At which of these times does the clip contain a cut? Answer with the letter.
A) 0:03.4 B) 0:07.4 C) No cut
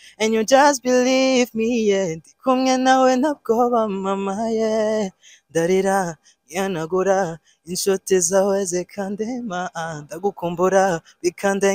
C